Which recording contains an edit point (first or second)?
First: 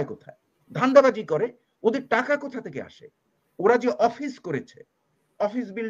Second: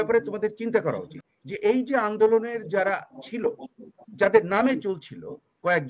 second